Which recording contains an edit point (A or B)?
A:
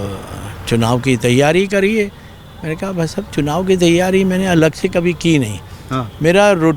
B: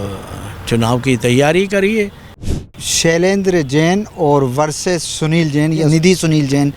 B